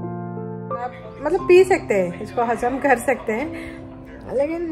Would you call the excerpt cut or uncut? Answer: cut